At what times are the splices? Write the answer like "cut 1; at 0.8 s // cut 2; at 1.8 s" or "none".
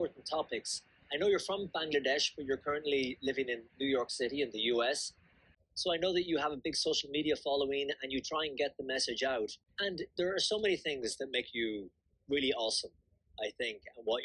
cut 1; at 5.5 s // cut 2; at 9.6 s